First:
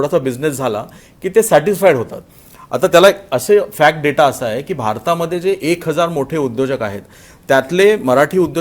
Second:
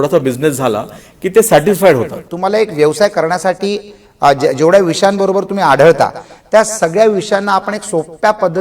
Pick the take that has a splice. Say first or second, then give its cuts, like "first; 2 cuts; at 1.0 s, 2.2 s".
second; 1 cut; at 2.3 s